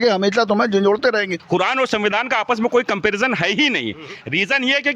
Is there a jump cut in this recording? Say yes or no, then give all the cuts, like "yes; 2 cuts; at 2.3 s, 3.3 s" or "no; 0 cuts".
yes; 1 cut; at 1.3 s